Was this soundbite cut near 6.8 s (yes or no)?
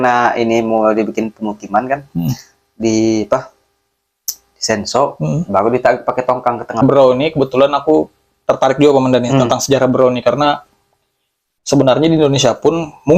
yes